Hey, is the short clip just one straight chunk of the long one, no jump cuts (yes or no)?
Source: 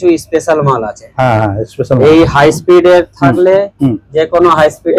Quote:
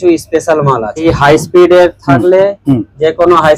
no